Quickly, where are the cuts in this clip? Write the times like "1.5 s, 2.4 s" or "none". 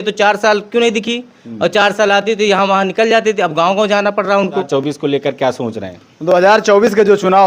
4.7 s